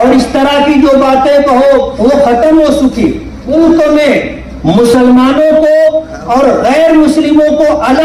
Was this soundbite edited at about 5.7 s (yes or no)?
no